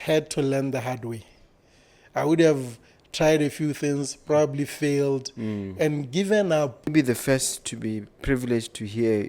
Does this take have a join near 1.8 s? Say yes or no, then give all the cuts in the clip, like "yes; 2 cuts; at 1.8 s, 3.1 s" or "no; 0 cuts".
no; 1 cut; at 6.9 s